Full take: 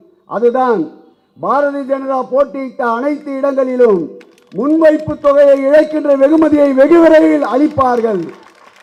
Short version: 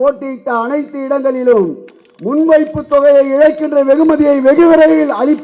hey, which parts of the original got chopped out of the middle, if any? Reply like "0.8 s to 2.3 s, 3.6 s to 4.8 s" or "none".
none